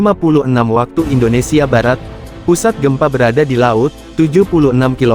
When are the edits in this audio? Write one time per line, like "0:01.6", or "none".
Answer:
0:02.1